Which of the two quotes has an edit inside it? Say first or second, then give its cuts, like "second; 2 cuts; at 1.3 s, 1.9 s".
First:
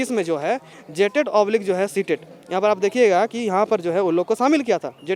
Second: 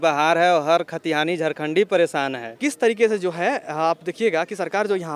second; 1 cut; at 2.5 s